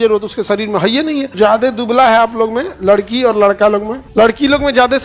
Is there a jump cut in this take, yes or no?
yes